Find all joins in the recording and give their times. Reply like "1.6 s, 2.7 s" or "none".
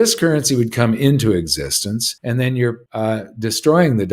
2.1 s, 2.8 s